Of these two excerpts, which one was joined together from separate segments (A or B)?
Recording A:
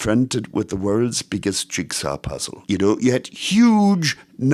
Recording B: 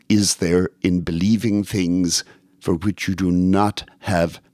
A